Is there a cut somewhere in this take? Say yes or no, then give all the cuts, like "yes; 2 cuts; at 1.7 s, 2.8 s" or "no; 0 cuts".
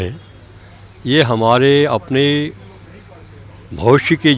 no; 0 cuts